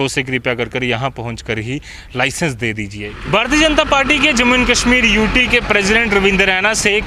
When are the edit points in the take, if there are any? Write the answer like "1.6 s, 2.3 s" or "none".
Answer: 3.2 s